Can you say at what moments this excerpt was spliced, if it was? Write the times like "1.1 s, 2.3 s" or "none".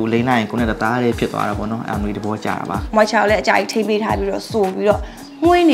2.8 s